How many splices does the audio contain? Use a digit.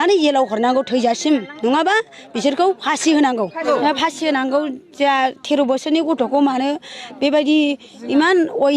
1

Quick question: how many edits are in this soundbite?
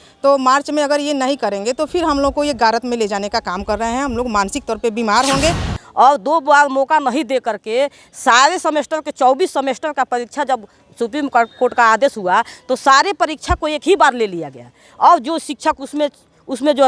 1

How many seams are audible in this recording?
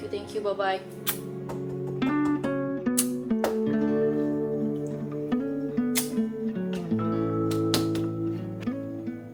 0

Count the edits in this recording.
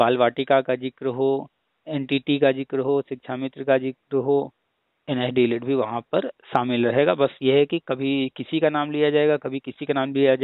0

